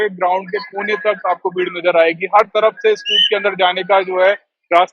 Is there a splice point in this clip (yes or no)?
no